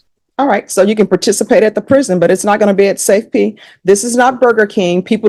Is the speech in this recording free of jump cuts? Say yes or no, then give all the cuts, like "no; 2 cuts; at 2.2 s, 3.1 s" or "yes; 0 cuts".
yes; 0 cuts